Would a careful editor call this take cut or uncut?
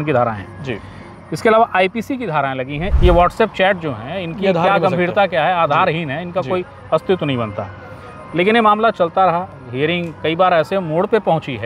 cut